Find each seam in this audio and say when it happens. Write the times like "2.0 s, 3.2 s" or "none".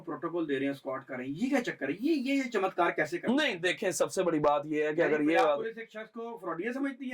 none